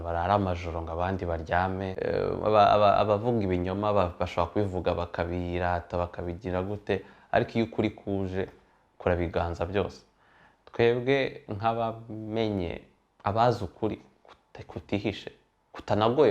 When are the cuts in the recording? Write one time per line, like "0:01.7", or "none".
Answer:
0:01.9